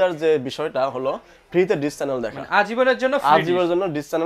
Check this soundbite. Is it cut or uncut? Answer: uncut